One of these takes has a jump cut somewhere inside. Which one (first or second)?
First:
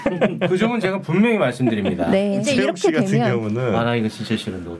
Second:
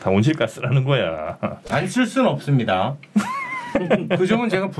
first